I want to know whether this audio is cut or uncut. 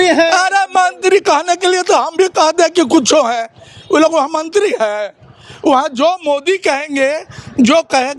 uncut